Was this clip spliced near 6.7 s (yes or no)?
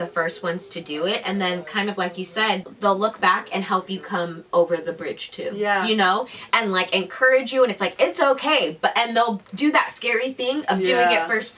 no